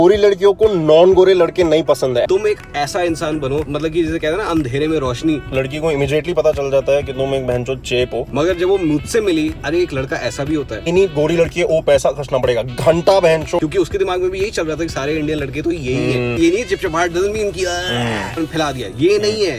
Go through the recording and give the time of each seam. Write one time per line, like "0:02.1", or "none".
0:02.2
0:03.7
0:05.4
0:08.3
0:09.6
0:10.8
0:13.6
0:16.4
0:18.4